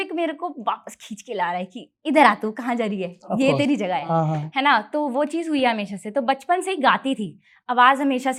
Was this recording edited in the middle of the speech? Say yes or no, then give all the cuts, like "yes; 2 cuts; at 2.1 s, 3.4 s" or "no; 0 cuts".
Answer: no; 0 cuts